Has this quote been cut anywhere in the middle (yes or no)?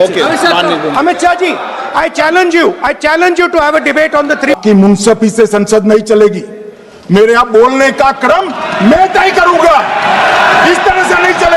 yes